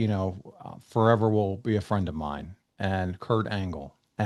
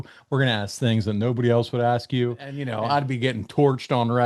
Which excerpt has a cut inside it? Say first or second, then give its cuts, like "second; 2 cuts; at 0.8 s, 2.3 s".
second; 1 cut; at 2.7 s